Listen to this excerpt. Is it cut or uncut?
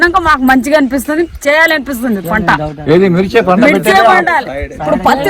uncut